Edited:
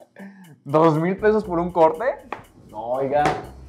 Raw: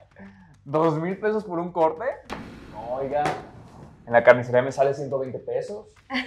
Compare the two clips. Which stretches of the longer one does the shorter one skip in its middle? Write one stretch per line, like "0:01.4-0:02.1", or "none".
none